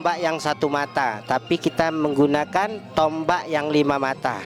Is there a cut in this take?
no; 0 cuts

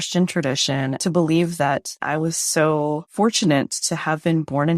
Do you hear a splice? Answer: yes; 1 cut; at 2.0 s

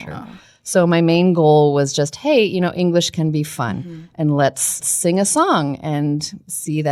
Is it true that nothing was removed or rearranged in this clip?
no; 1 cut; at 4.9 s

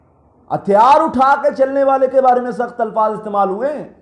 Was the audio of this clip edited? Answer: no; 0 cuts

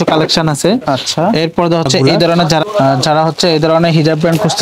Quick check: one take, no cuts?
no; 1 cut; at 2.6 s

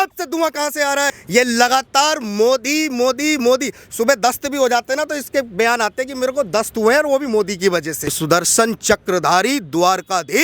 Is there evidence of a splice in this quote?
yes; 2 cuts; at 1.2 s, 8.2 s

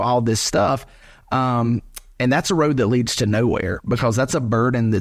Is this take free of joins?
yes; 0 cuts

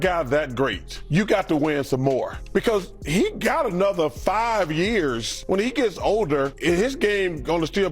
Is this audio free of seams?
no; 4 cuts; at 0.9 s, 2.4 s, 5.3 s, 6.5 s

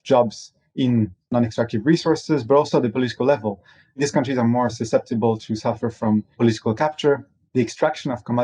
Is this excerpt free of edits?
no; 1 cut; at 1.2 s

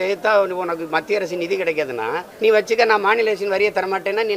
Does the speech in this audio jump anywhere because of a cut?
yes; 1 cut; at 2.3 s

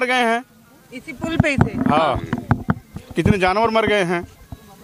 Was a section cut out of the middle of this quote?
no; 0 cuts

